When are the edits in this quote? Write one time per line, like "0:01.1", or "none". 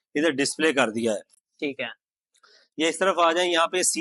none